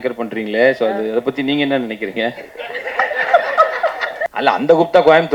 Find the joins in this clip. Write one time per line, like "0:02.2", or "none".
0:04.3